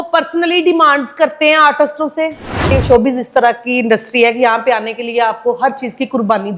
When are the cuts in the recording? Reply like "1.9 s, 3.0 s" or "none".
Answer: 2.6 s